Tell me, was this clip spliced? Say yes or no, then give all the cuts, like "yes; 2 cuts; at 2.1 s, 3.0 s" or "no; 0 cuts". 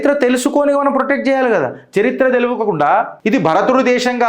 yes; 1 cut; at 3.2 s